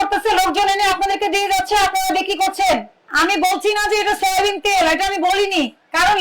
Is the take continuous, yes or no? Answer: no